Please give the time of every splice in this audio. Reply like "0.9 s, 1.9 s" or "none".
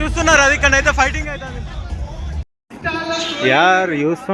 2.5 s